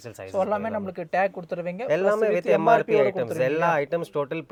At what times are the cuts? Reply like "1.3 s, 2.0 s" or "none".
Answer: none